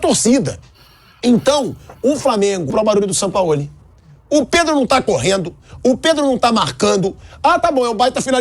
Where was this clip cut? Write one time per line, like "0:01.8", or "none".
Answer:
0:02.7